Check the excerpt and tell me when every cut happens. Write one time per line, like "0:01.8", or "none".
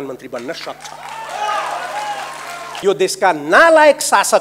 0:02.8